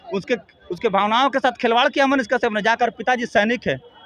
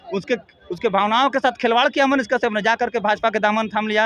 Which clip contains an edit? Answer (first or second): first